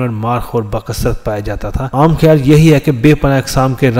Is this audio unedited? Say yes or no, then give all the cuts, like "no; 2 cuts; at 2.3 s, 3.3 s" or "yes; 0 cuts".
no; 1 cut; at 1.8 s